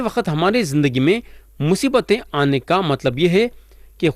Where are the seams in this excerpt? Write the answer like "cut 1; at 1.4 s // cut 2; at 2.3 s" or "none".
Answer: none